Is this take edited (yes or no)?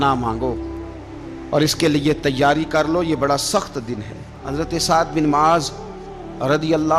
yes